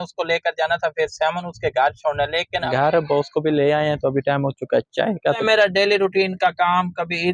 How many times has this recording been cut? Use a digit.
2